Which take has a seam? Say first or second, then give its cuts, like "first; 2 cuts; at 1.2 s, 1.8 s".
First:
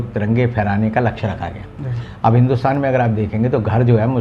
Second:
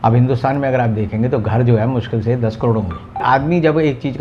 second; 1 cut; at 3.2 s